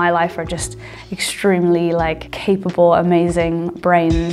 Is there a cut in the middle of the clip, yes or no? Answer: no